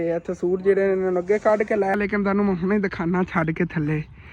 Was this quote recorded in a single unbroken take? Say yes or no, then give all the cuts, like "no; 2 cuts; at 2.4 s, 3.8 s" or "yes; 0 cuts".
no; 1 cut; at 1.9 s